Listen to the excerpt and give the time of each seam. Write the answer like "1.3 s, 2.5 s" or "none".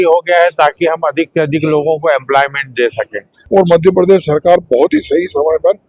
3.3 s